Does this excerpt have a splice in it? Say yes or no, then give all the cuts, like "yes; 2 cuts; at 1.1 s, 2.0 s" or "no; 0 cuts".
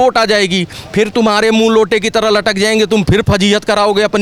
no; 0 cuts